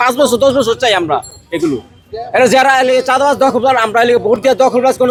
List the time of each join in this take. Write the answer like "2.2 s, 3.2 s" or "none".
none